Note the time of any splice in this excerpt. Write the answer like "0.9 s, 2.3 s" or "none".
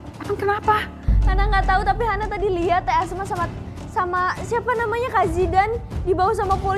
none

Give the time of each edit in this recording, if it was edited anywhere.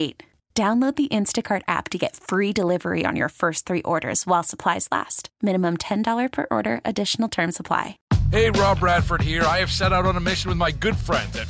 8.0 s

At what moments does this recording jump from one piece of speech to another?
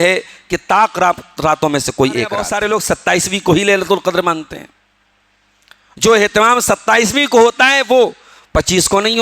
2.5 s

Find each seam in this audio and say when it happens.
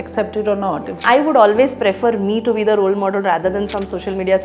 0.9 s

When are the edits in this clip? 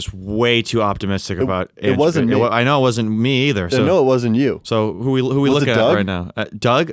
none

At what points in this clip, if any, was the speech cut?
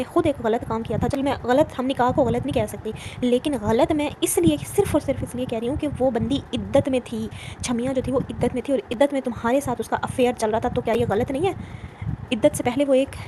none

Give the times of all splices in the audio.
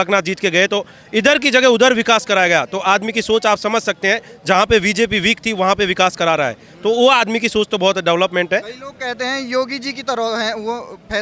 none

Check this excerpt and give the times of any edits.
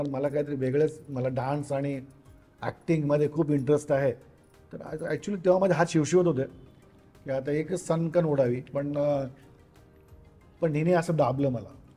none

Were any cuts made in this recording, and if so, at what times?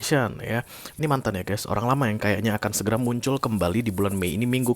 1.0 s

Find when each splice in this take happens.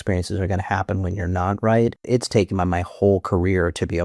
2.0 s

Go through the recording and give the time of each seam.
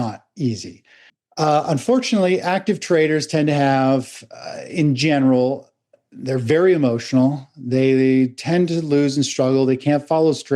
1.2 s

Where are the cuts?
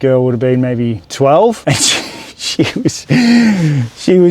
1.0 s, 1.6 s

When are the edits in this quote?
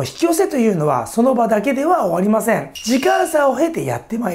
none

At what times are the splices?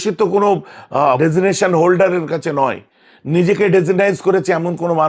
1.2 s

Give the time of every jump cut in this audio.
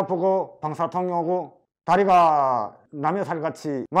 none

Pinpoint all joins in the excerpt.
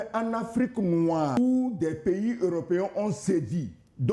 1.4 s

